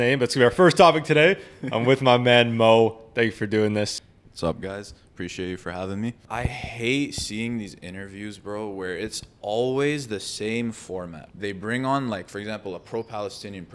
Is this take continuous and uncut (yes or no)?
no